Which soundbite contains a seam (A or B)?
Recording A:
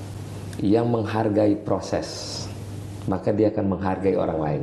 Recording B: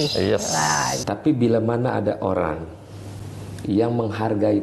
B